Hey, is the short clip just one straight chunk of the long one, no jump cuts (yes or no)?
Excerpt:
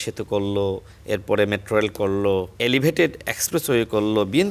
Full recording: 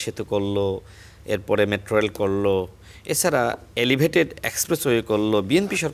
no